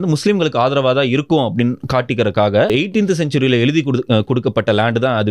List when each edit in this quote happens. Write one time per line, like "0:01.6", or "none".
0:02.7